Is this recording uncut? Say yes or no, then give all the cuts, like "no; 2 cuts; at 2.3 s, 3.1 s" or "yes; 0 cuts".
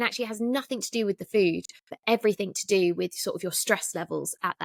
yes; 0 cuts